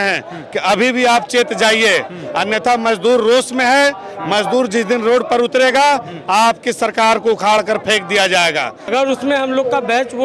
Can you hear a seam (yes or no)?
yes